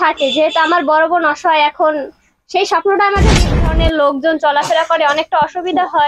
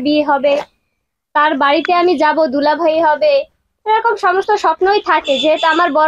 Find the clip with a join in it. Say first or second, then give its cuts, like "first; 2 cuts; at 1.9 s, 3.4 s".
first; 1 cut; at 3.4 s